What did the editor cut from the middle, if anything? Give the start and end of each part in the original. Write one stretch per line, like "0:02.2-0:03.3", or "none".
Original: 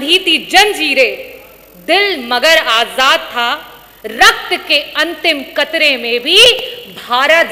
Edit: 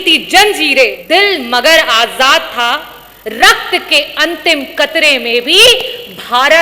0:01.2-0:01.8